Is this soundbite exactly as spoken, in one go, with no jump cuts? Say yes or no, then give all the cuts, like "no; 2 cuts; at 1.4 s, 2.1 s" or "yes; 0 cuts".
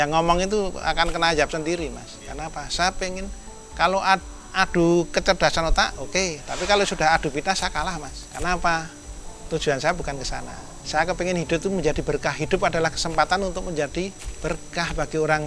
no; 1 cut; at 14.2 s